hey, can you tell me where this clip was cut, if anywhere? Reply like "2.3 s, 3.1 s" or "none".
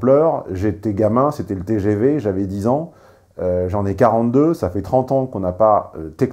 none